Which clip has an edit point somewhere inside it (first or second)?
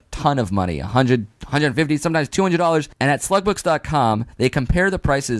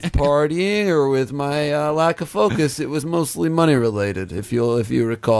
second